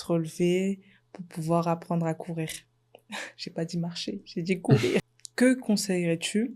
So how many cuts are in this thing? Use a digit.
1